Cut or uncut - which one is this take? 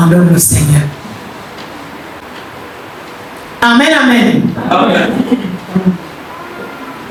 uncut